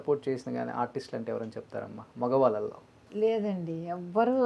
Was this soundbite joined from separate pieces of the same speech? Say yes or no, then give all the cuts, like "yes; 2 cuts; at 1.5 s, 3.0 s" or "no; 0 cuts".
no; 0 cuts